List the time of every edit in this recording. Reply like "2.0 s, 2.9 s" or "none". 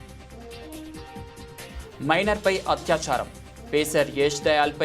1.2 s, 2.0 s